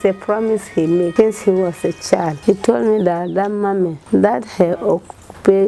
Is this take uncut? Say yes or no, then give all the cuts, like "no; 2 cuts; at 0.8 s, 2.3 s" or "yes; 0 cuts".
no; 3 cuts; at 1.1 s, 2.3 s, 4.0 s